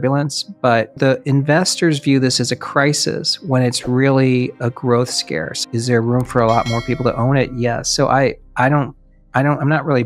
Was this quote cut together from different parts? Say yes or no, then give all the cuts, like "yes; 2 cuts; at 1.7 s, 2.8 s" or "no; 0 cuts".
yes; 2 cuts; at 1.0 s, 5.6 s